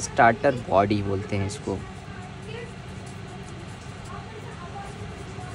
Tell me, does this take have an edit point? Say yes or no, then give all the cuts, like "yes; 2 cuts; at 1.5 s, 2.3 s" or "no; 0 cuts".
no; 0 cuts